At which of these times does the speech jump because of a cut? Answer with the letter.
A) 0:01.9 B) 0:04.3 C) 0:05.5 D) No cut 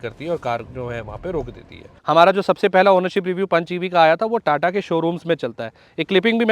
A